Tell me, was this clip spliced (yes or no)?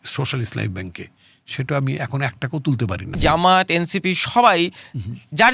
yes